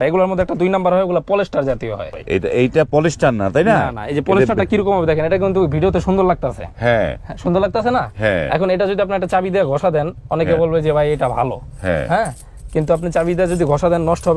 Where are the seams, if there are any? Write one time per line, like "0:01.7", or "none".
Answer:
0:02.1